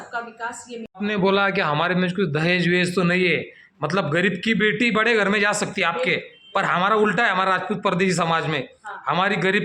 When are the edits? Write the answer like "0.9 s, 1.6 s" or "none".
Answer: 0.9 s